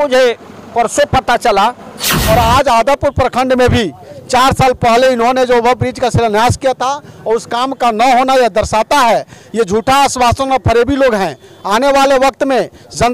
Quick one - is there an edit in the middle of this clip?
yes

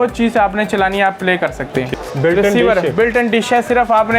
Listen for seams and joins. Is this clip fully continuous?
no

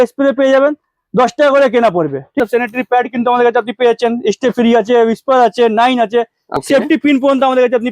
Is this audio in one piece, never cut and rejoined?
no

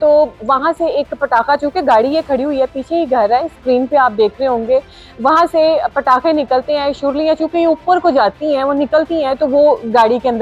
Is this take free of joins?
yes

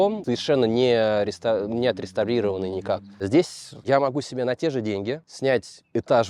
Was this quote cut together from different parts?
yes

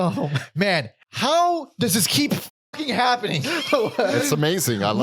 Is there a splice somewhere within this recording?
yes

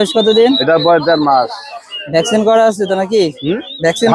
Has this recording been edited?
no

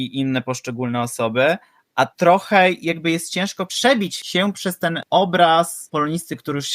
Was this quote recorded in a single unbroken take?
no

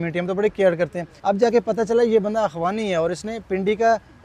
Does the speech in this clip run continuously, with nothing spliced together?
no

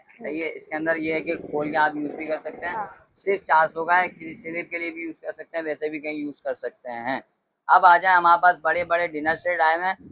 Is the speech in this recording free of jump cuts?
yes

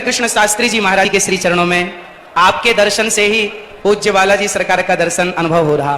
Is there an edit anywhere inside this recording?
yes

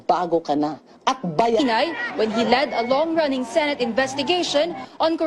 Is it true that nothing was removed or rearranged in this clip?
yes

